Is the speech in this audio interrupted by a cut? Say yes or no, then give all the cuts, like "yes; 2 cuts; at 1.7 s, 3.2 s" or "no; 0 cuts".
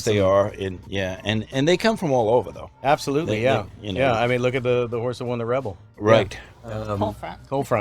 yes; 1 cut; at 5.8 s